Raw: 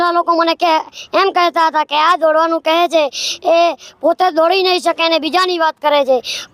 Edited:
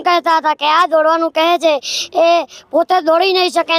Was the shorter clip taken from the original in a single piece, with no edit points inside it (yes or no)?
yes